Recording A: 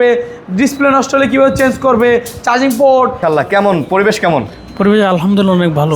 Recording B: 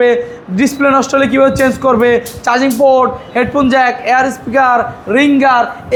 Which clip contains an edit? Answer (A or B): A